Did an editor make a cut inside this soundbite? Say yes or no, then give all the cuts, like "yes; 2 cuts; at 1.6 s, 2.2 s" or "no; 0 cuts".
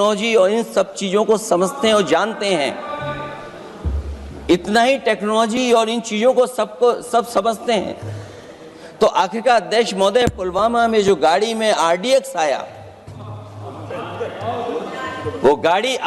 no; 0 cuts